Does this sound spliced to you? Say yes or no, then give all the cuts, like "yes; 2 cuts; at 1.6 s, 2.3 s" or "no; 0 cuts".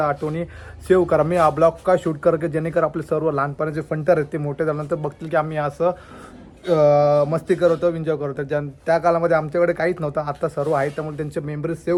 no; 0 cuts